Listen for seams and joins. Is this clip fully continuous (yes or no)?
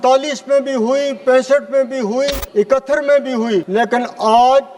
no